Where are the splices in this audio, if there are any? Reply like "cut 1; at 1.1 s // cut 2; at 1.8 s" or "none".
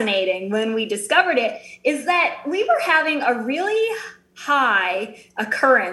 none